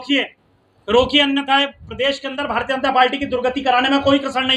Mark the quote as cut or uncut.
uncut